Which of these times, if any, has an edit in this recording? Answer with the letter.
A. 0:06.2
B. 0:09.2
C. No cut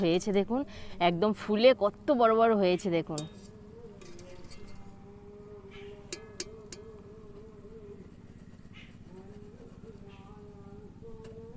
C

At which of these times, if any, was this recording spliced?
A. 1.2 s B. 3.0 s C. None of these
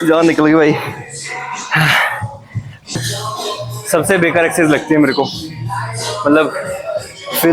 B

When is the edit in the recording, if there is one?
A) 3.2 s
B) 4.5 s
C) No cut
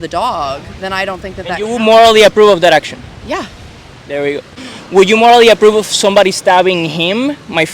B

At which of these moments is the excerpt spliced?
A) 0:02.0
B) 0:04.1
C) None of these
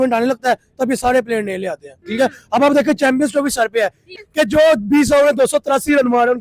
B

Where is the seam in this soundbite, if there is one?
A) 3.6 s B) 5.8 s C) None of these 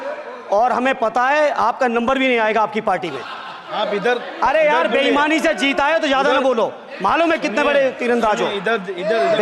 A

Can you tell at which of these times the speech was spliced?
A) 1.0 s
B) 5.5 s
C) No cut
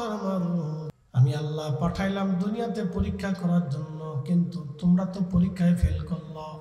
A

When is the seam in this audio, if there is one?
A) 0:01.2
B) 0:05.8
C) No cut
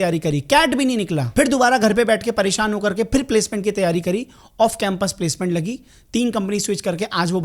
A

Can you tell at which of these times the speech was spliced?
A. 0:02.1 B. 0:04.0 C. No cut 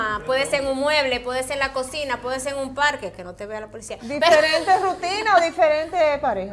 C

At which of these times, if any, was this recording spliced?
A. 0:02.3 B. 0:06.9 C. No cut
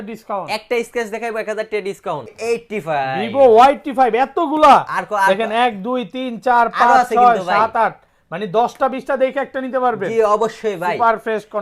A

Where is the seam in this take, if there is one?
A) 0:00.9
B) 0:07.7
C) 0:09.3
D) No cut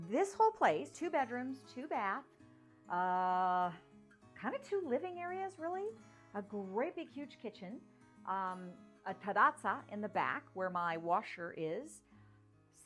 A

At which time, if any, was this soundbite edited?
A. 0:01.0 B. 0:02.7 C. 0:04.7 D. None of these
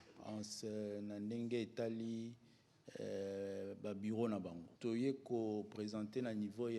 C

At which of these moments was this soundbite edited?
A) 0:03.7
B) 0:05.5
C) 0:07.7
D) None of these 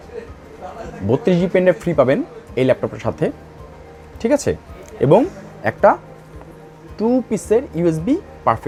D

